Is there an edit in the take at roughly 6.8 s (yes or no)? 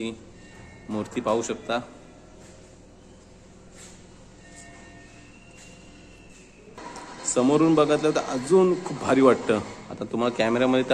yes